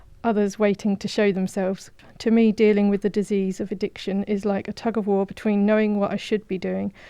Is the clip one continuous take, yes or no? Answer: no